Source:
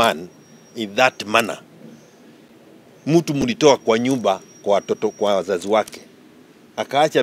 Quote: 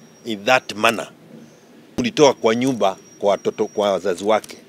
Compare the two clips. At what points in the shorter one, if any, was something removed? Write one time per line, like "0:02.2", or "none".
0:02.0